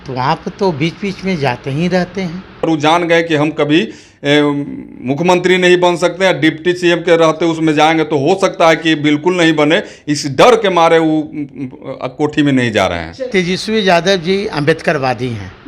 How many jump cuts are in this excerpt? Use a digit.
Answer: 2